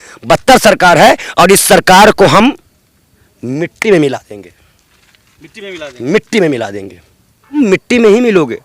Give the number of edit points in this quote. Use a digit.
1